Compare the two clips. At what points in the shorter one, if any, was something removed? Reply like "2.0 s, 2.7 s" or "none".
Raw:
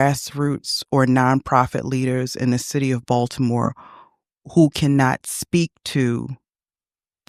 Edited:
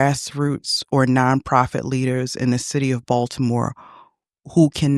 none